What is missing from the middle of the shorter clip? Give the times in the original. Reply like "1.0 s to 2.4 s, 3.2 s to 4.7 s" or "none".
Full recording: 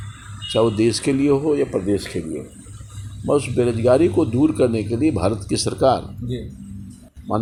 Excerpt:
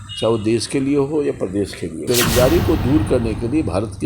2.3 s to 3.5 s